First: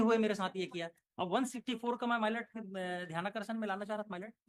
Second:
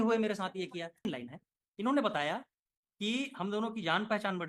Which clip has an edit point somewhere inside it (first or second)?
second